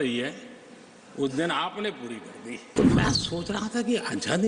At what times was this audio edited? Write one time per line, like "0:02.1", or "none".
0:02.7